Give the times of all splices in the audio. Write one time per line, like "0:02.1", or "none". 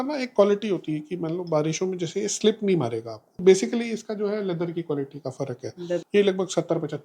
0:03.4
0:06.0

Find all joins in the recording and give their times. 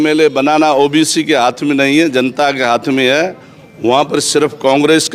none

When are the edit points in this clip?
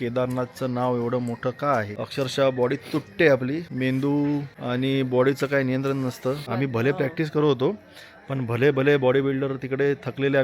0:02.0
0:03.7
0:04.5
0:06.5

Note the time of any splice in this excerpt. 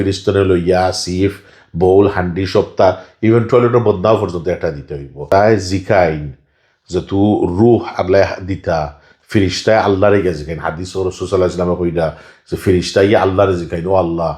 0:05.3

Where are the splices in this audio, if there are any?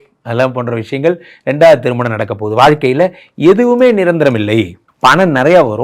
0:04.8

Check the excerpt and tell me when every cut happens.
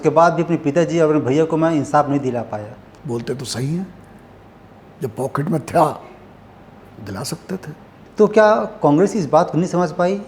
0:02.8
0:08.0

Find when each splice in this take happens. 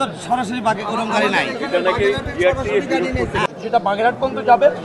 0:03.6

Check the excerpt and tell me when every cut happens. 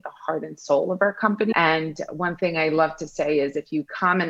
0:01.5

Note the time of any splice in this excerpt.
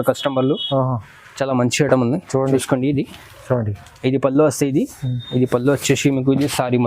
0:02.6

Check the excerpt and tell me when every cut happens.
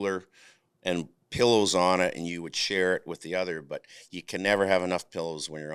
none

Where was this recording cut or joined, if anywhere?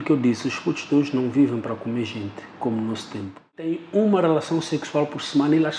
0:03.9

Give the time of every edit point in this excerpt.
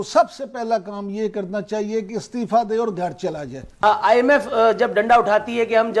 0:03.7

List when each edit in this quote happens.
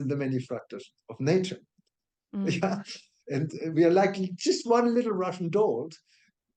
none

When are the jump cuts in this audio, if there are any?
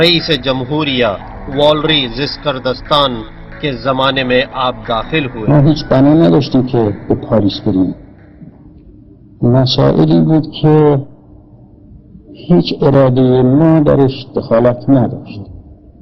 none

